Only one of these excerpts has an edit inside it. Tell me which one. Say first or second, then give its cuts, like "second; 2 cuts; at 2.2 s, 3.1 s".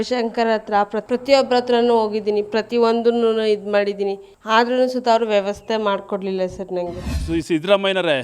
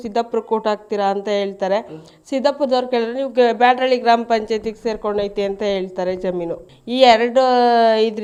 first; 2 cuts; at 4.3 s, 7.1 s